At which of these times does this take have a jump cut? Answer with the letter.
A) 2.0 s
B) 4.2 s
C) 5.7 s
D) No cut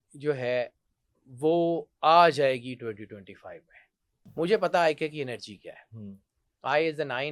B